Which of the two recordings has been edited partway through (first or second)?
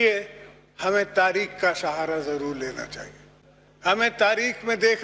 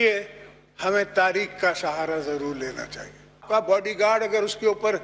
second